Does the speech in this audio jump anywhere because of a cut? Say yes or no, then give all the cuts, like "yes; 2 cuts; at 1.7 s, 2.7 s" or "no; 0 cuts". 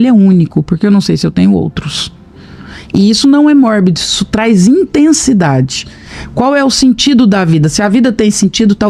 no; 0 cuts